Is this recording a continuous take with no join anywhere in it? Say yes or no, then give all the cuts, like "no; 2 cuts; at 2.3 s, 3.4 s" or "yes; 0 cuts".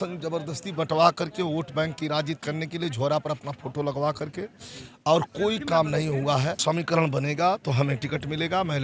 no; 1 cut; at 6.6 s